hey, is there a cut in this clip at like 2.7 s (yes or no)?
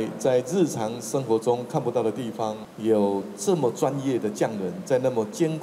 yes